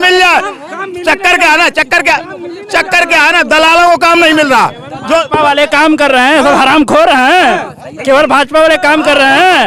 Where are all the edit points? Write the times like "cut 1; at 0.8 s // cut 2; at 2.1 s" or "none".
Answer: none